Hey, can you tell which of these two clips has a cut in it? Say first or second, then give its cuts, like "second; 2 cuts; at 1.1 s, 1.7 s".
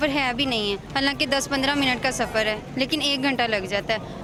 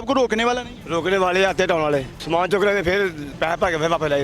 second; 2 cuts; at 2.1 s, 3.2 s